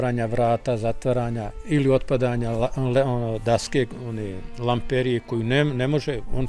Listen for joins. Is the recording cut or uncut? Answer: uncut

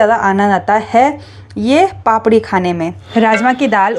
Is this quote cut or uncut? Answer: cut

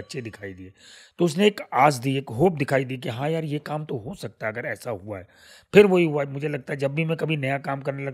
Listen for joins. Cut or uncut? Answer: uncut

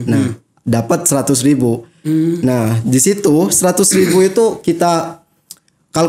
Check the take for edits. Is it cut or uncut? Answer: uncut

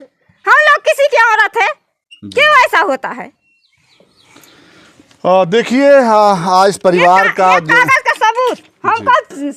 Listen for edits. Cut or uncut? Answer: uncut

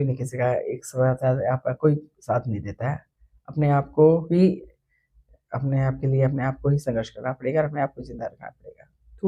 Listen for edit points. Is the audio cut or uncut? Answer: uncut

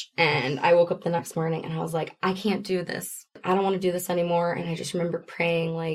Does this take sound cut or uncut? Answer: cut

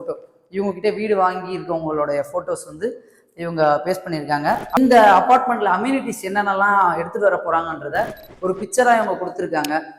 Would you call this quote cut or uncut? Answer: cut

